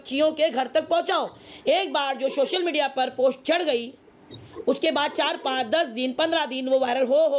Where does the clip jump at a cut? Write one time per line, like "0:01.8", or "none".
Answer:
0:01.4